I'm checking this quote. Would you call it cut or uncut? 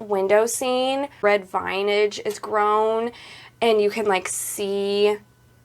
cut